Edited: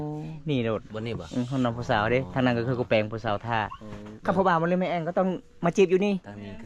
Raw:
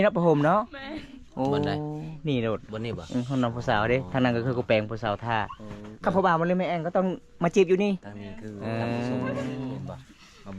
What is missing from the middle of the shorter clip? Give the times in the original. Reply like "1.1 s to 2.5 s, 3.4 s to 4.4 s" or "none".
none